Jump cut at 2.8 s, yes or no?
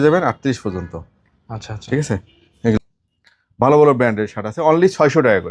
yes